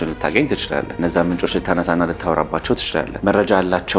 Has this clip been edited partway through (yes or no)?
no